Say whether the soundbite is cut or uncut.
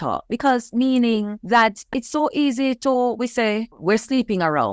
cut